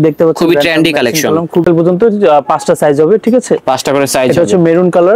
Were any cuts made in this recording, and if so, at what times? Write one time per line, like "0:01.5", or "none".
0:01.6